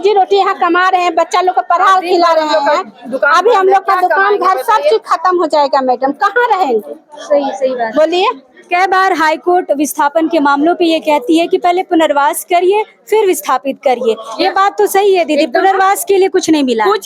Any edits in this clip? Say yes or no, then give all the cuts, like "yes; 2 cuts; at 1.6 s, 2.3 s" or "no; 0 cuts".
no; 0 cuts